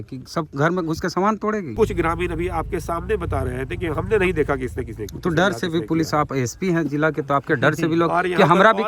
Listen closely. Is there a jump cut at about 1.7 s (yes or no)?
yes